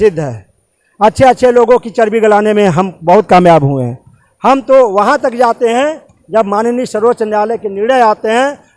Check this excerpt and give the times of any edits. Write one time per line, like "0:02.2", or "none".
none